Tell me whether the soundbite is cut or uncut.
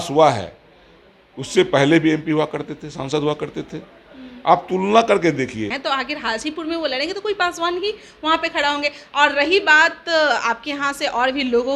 cut